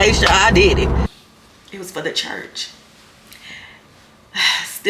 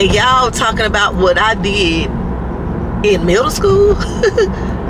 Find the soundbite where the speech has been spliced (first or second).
first